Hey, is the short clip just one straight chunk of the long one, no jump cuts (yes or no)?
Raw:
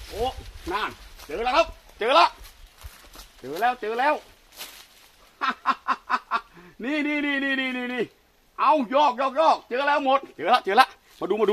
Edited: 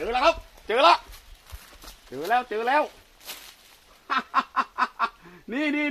yes